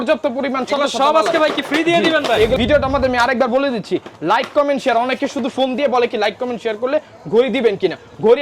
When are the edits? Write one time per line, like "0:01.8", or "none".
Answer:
0:02.6